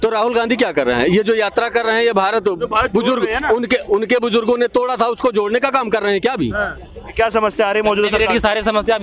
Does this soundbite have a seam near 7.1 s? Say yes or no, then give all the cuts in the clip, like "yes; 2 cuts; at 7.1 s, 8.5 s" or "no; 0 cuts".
yes; 1 cut; at 7.1 s